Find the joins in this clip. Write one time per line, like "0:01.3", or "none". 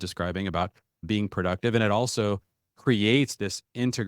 0:01.0